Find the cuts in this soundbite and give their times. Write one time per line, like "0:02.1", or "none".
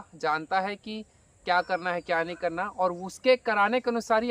none